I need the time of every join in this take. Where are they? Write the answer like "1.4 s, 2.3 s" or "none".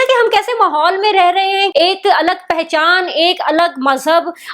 1.7 s